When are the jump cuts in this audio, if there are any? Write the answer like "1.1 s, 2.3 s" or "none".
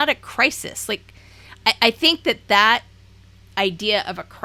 none